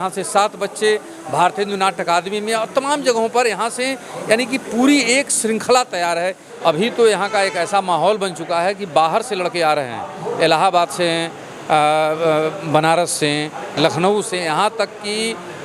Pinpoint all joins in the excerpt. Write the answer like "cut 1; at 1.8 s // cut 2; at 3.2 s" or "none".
cut 1; at 6.5 s